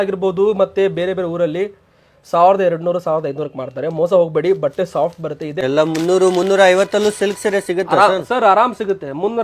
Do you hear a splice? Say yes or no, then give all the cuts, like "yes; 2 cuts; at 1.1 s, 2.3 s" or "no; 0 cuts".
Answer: yes; 1 cut; at 5.6 s